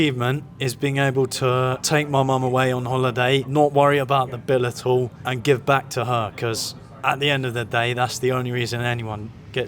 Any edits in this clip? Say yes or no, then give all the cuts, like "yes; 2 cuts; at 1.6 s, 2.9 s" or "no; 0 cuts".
yes; 2 cuts; at 1.8 s, 3.5 s